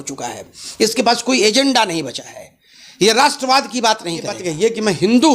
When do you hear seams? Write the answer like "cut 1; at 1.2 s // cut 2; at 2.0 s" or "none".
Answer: cut 1; at 4.4 s